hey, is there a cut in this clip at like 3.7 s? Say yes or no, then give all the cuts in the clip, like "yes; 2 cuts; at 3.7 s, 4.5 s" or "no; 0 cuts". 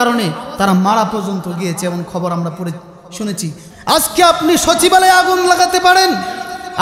yes; 1 cut; at 3.7 s